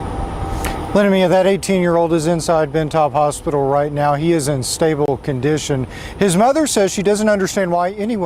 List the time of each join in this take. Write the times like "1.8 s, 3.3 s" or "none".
5.1 s